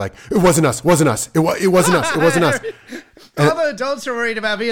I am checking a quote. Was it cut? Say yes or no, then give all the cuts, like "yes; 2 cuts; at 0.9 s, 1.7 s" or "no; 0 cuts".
no; 0 cuts